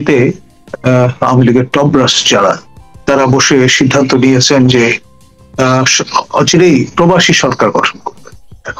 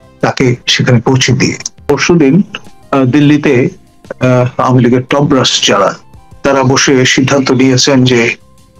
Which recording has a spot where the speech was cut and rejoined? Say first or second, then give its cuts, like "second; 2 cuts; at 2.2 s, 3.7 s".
second; 1 cut; at 1.9 s